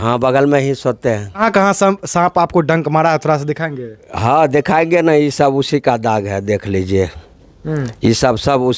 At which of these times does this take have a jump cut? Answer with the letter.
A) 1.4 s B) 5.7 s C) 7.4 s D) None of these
A